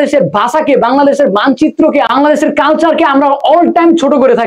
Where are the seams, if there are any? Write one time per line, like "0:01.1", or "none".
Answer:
0:02.1